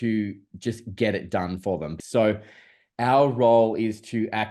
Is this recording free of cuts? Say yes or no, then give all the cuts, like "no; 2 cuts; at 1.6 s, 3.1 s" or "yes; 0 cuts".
no; 1 cut; at 2.0 s